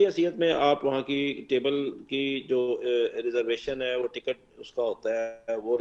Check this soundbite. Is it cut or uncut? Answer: uncut